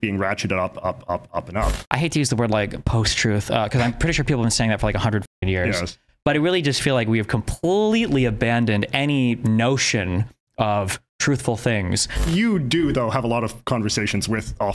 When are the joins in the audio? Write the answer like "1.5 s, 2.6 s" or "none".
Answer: 1.8 s, 12.3 s